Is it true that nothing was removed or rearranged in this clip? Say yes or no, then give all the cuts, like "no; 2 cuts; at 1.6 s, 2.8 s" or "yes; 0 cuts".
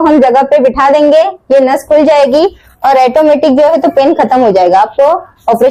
yes; 0 cuts